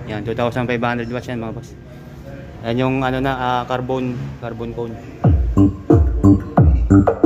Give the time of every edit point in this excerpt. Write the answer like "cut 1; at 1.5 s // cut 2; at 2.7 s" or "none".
none